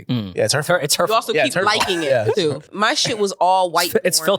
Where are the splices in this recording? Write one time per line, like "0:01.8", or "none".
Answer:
0:02.7

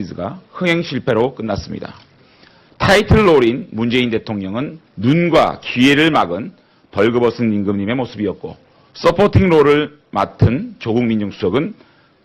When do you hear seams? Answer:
none

